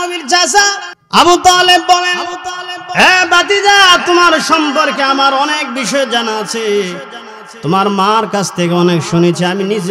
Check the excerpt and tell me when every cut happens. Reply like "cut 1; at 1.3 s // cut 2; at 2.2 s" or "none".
cut 1; at 0.9 s